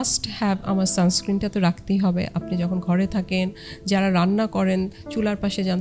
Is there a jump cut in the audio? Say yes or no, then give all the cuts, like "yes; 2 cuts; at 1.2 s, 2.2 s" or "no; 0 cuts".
no; 0 cuts